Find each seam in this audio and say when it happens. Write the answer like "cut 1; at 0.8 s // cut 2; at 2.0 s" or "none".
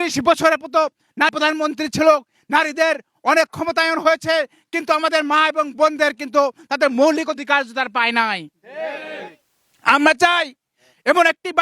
cut 1; at 1.3 s